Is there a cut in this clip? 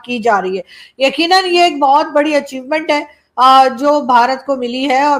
no; 0 cuts

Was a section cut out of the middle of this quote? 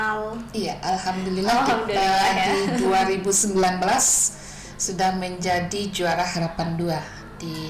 no; 0 cuts

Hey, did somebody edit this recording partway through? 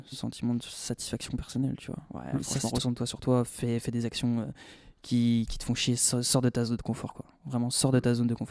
yes; 1 cut; at 2.5 s

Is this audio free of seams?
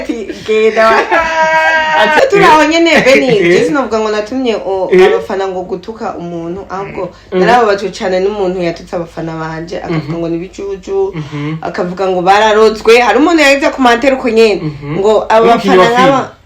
no; 1 cut; at 2.2 s

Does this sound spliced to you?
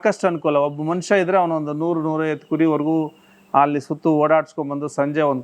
no; 0 cuts

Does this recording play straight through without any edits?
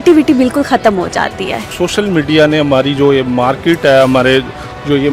no; 1 cut; at 1.8 s

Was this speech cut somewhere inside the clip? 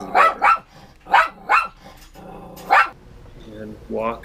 yes; 1 cut; at 2.9 s

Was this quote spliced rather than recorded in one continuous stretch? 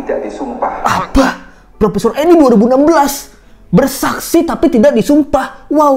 no; 0 cuts

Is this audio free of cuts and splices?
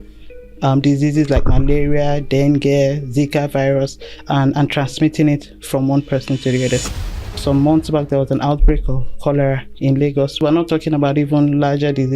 no; 2 cuts; at 6.9 s, 10.3 s

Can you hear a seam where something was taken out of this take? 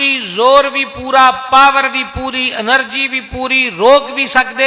no; 0 cuts

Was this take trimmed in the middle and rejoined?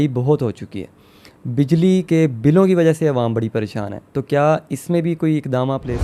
no; 0 cuts

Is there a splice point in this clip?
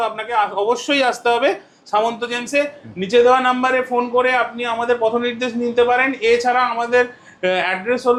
no; 0 cuts

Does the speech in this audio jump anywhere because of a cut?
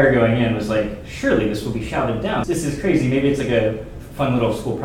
no; 0 cuts

